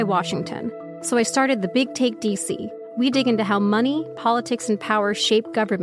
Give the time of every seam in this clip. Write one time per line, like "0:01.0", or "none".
0:00.9
0:02.8